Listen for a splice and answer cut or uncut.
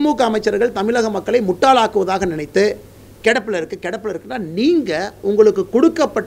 uncut